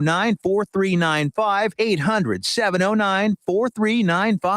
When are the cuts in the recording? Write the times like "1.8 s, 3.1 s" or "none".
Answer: 1.7 s